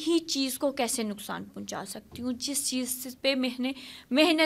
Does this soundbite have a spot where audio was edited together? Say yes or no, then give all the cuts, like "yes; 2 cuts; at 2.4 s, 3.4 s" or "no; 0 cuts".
no; 0 cuts